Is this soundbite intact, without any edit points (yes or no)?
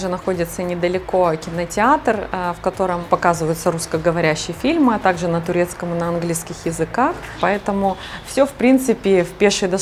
yes